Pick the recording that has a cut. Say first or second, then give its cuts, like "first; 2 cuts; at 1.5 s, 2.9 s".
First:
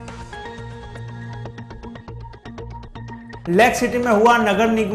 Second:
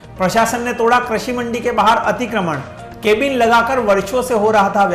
first; 1 cut; at 3.5 s